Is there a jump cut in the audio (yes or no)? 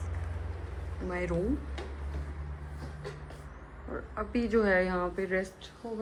no